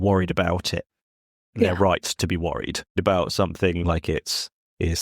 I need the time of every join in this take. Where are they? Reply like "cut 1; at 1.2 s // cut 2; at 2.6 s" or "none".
cut 1; at 3.0 s